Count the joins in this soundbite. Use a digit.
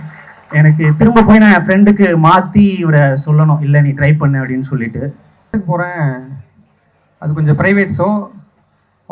1